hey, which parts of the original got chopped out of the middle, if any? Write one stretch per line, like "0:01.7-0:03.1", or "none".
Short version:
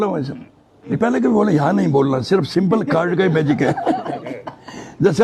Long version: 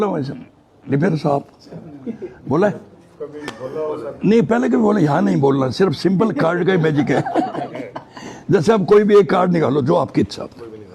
0:01.0-0:04.4